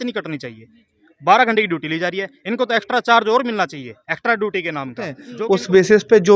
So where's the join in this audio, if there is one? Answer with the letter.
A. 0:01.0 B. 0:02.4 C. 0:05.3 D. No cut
C